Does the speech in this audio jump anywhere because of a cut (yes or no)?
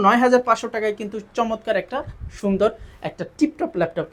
no